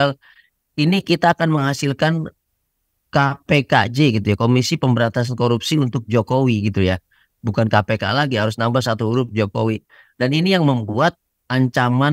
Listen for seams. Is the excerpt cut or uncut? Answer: uncut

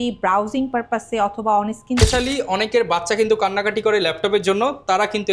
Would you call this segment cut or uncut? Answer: cut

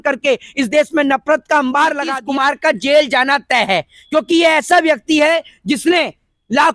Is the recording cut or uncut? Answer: cut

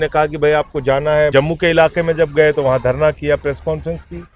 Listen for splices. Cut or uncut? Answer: cut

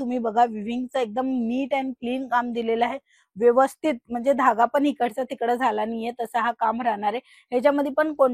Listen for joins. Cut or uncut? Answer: uncut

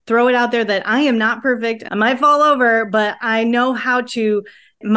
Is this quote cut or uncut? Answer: cut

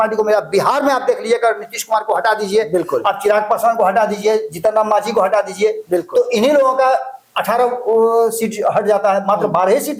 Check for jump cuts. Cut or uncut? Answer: uncut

